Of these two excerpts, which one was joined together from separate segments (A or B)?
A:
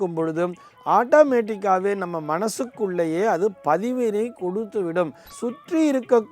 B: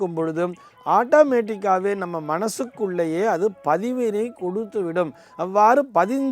A